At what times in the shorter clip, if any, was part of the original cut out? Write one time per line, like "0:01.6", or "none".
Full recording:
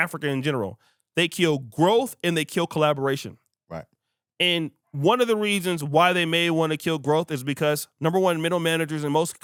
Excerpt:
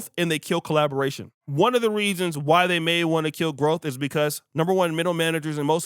0:01.4